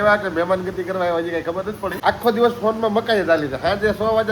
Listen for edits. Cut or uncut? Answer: cut